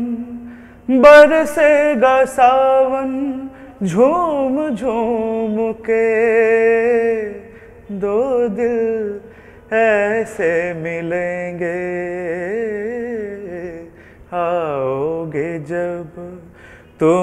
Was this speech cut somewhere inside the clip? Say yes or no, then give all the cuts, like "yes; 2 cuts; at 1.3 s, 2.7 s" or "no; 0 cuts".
no; 0 cuts